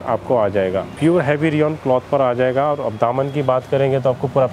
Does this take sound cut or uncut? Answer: cut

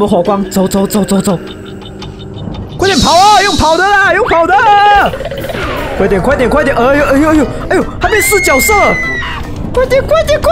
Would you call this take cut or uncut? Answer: cut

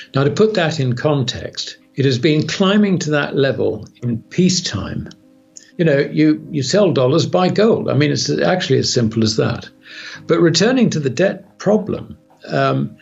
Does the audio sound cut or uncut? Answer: cut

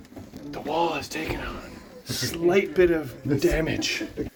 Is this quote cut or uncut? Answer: uncut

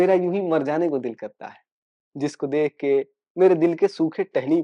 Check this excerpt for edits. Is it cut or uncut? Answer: uncut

